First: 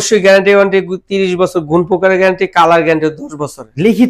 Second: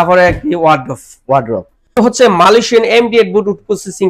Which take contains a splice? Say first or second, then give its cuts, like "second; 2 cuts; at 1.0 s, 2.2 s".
second; 1 cut; at 2.0 s